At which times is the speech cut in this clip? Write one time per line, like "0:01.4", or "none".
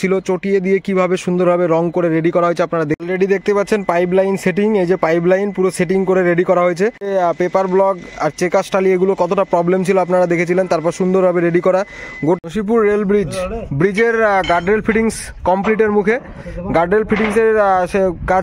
0:03.0
0:07.1
0:12.4